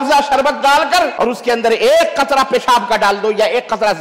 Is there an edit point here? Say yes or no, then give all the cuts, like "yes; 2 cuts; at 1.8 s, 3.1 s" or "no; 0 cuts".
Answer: yes; 1 cut; at 1.1 s